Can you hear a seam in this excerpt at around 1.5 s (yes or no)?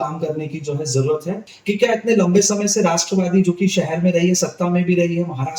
yes